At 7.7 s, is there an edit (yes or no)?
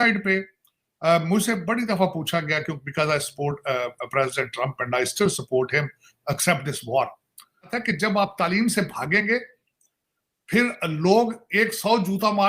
yes